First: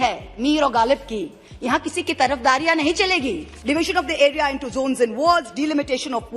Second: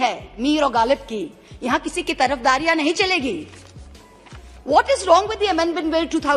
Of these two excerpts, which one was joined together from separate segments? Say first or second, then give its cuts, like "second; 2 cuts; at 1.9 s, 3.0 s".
first; 1 cut; at 3.5 s